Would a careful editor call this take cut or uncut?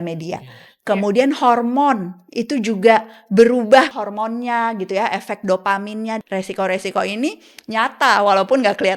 cut